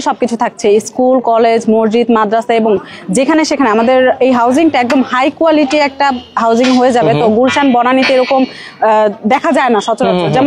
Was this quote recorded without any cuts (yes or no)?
yes